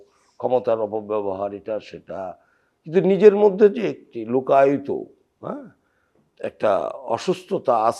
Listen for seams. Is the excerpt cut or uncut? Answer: uncut